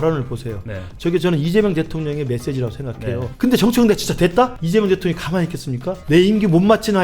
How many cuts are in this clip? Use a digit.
3